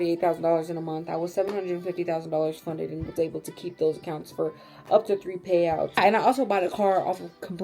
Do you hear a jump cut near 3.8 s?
no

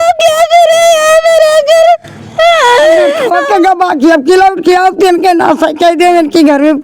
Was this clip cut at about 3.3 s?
yes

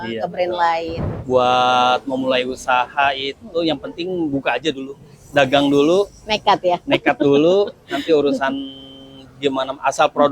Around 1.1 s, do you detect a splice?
yes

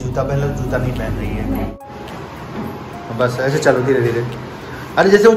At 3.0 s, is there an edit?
no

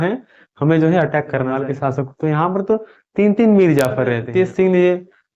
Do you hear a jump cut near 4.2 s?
yes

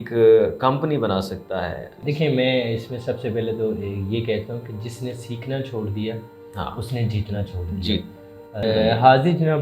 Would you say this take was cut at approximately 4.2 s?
no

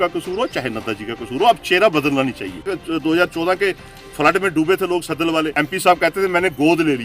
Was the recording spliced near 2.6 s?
yes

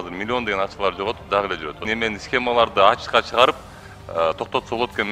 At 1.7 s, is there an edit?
yes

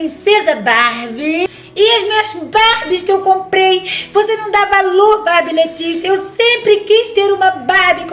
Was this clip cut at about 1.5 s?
yes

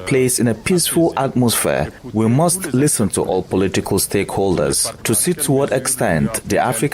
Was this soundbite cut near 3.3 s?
no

